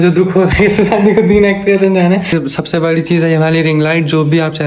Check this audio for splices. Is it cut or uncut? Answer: cut